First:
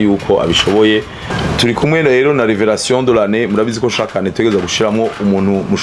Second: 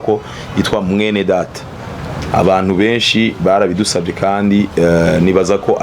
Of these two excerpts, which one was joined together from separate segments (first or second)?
first